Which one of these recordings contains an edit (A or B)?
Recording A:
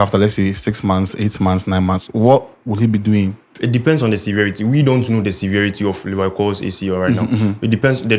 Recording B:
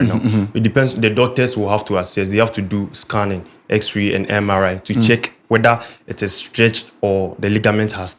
A